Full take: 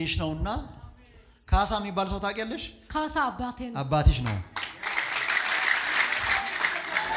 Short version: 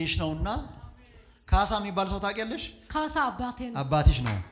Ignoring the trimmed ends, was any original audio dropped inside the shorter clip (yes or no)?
no